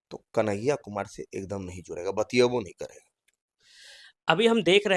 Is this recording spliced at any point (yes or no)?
no